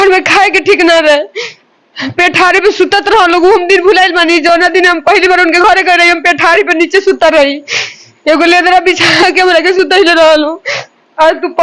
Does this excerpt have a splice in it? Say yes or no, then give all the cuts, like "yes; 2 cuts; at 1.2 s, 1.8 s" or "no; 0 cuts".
no; 0 cuts